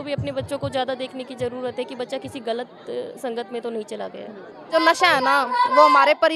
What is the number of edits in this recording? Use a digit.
1